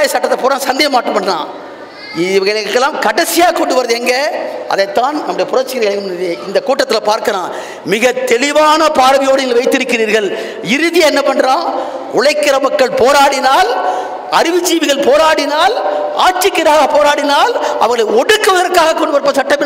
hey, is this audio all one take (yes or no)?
yes